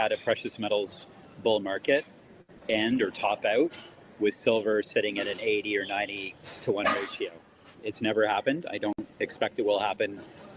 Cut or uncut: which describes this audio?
uncut